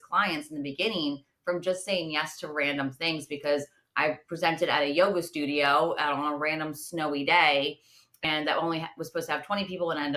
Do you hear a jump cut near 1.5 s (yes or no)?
no